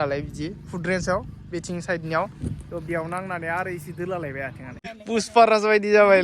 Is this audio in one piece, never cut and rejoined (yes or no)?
no